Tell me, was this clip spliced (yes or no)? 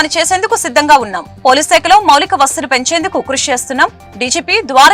no